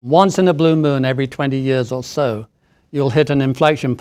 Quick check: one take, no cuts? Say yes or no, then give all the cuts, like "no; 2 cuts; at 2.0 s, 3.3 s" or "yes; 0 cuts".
yes; 0 cuts